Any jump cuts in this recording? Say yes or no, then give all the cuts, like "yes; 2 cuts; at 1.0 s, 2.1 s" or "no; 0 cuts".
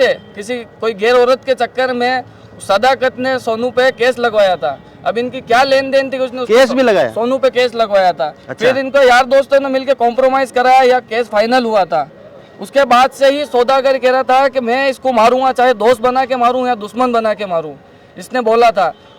no; 0 cuts